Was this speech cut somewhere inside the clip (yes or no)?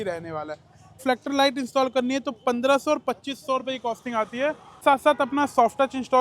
yes